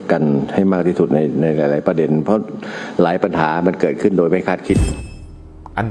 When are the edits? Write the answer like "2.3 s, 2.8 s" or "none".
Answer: 5.0 s